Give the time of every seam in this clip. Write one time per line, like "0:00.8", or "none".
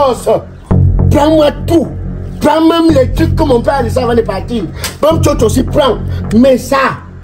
none

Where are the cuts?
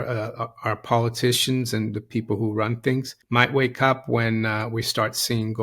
0:03.2

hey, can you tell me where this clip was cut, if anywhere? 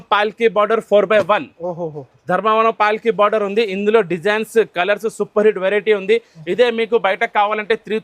none

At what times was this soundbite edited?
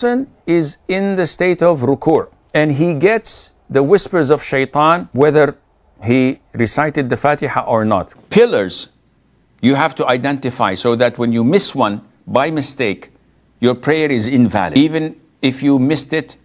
0:02.4
0:05.1
0:08.2
0:14.7

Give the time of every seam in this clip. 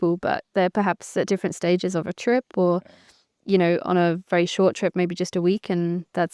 none

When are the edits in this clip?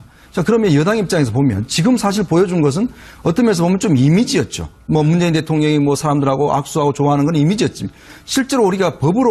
0:08.2

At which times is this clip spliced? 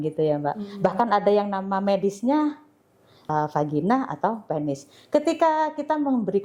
0:03.3

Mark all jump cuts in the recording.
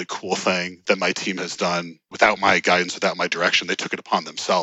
0:00.9
0:02.0

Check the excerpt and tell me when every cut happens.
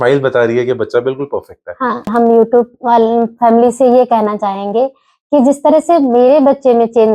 none

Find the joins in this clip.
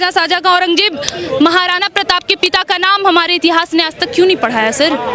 none

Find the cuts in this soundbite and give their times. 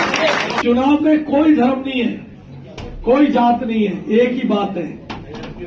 0:00.9

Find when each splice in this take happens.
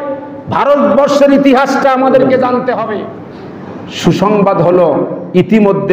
0:03.0

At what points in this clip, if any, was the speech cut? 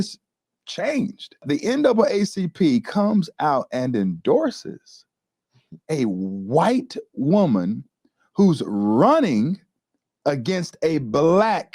0:01.4

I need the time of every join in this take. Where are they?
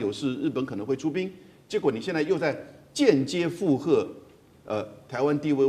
none

